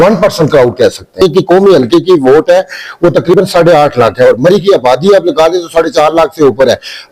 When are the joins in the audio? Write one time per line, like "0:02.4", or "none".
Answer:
0:01.2